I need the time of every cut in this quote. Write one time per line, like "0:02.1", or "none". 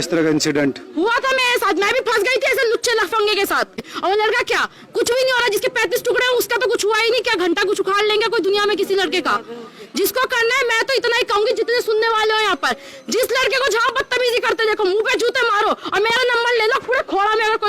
0:03.9